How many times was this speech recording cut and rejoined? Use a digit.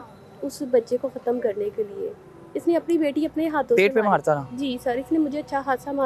0